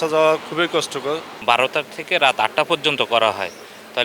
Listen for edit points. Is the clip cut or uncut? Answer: cut